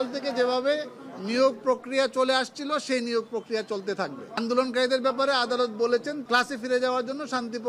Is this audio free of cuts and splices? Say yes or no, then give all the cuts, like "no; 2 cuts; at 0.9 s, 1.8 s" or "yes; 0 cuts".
no; 2 cuts; at 4.4 s, 6.2 s